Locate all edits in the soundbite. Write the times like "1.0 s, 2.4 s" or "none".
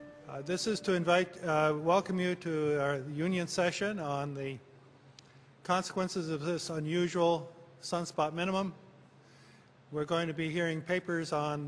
2.1 s